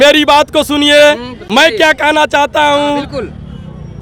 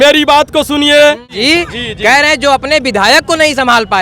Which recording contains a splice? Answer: second; 1 cut; at 1.4 s

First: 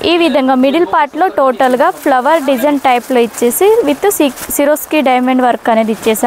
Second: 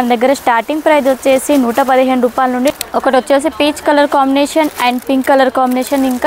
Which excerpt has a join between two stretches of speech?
second; 1 cut; at 2.8 s

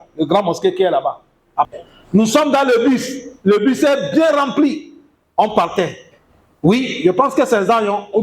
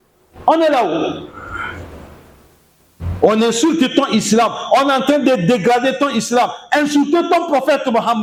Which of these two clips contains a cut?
first; 1 cut; at 1.7 s

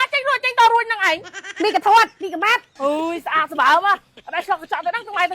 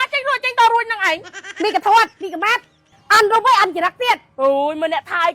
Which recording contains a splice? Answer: first; 1 cut; at 2.7 s

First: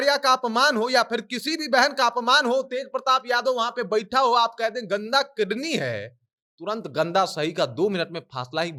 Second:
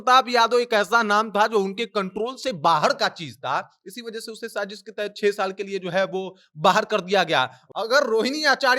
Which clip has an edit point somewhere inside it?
second; 1 cut; at 7.6 s

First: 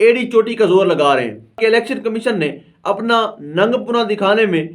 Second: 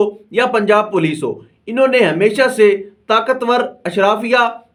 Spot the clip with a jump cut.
first; 1 cut; at 1.6 s

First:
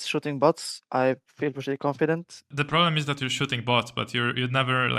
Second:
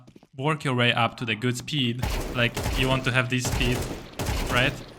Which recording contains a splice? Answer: first; 1 cut; at 2.4 s

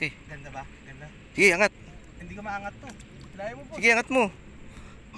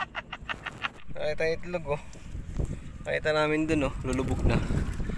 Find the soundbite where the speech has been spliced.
second; 1 cut; at 0.9 s

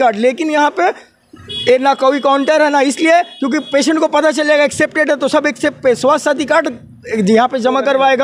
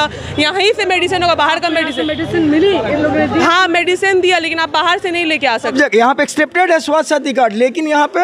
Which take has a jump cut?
second; 1 cut; at 5.7 s

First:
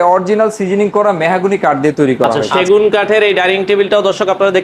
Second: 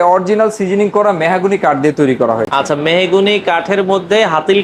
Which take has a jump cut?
first; 1 cut; at 2.5 s

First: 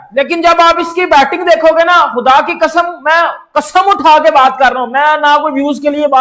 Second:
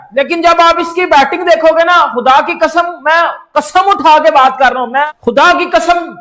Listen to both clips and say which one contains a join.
second; 1 cut; at 5.1 s

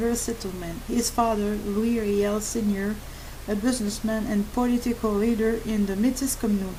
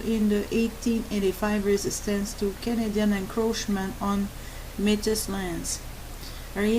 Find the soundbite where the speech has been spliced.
second; 1 cut; at 5.2 s

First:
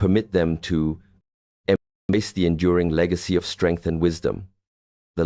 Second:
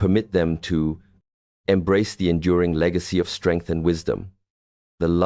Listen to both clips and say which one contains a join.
second; 1 cut; at 1.9 s

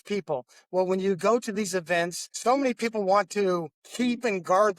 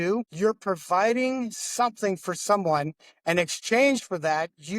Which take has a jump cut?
first; 2 cuts; at 2.2 s, 3.8 s

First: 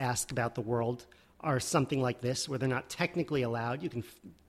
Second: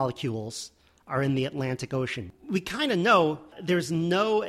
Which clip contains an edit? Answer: second; 2 cuts; at 2.2 s, 3.5 s

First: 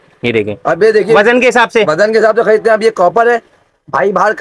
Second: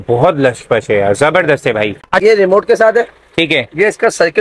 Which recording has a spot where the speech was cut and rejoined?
second; 1 cut; at 2.1 s

